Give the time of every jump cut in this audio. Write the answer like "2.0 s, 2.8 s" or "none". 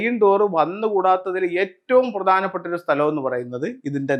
none